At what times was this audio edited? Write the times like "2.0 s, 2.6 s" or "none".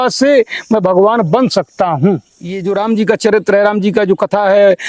2.6 s